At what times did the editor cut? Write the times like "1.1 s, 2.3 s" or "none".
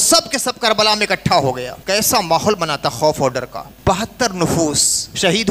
1.7 s, 3.6 s

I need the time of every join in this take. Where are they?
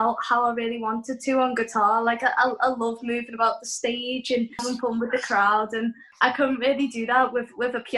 4.6 s, 6.0 s

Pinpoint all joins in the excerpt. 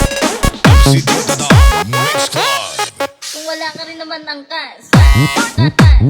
1.6 s, 3.2 s, 4.9 s

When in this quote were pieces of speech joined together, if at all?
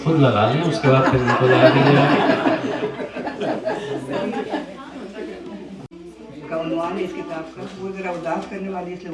none

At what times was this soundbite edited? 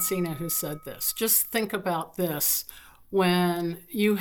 none

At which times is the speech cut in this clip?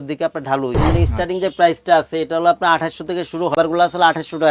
0.8 s, 3.6 s

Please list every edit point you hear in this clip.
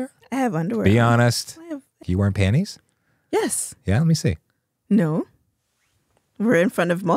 1.9 s

